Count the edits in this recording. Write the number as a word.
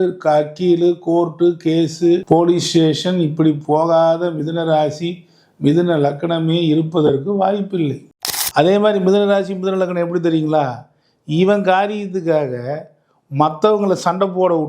one